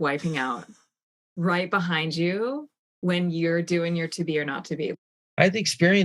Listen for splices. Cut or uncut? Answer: cut